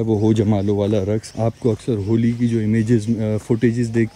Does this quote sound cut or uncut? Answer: uncut